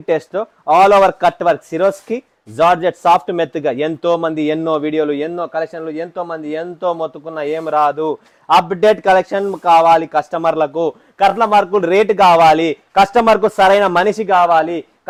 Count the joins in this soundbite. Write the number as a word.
zero